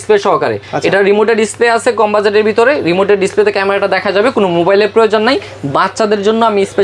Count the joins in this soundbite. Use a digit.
0